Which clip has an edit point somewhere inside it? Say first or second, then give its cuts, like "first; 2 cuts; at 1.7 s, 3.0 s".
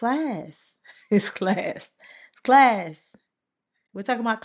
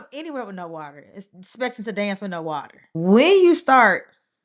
second; 1 cut; at 3.0 s